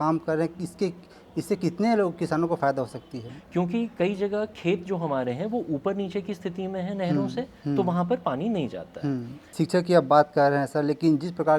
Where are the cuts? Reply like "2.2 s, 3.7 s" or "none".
3.3 s, 9.4 s